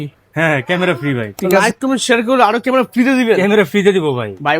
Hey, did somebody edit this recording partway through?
yes; 1 cut; at 1.7 s

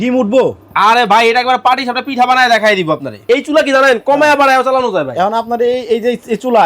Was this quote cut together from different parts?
yes; 1 cut; at 3.2 s

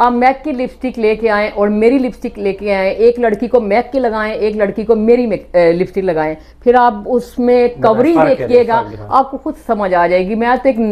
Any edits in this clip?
no; 0 cuts

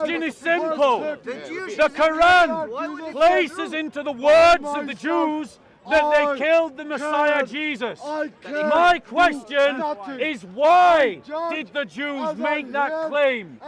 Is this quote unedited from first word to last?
yes; 0 cuts

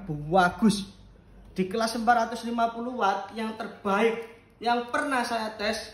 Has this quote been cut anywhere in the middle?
no; 0 cuts

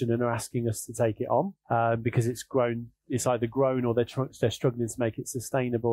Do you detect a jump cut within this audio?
yes; 1 cut; at 1.6 s

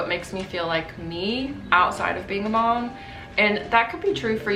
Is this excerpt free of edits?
yes; 0 cuts

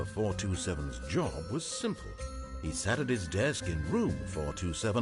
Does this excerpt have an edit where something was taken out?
yes; 1 cut; at 1.0 s

